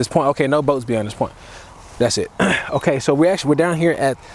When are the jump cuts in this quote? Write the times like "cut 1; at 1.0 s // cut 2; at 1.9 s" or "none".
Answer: none